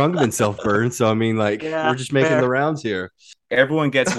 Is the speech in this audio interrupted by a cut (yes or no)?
yes